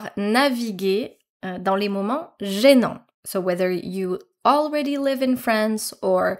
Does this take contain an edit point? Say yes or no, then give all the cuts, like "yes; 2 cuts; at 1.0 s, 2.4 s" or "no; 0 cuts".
no; 0 cuts